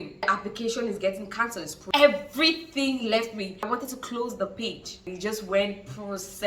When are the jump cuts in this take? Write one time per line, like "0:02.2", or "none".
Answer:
none

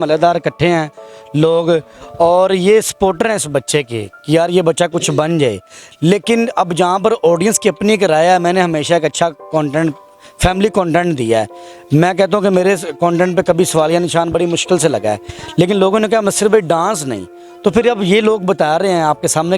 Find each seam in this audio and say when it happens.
none

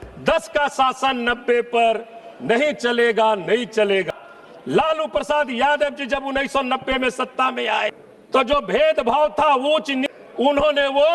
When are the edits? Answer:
0:04.1
0:08.1
0:10.0

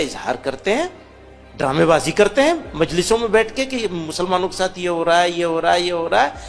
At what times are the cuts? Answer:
none

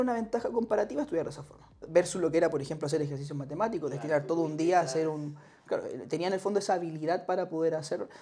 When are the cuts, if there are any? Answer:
0:01.8

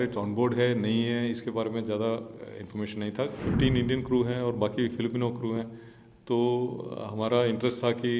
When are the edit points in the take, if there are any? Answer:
0:03.4

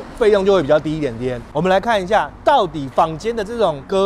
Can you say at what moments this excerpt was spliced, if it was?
0:01.5

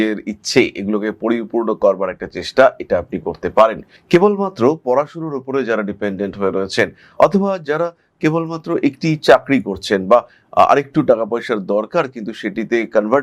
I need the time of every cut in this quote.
none

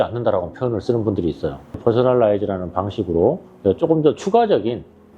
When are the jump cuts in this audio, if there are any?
0:01.7

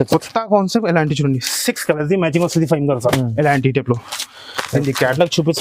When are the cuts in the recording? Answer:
none

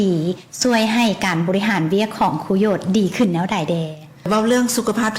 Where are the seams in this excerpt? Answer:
0:04.3

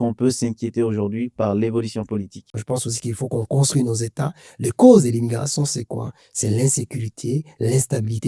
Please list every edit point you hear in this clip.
0:02.4

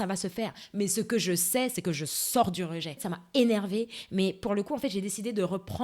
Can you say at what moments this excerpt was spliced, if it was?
none

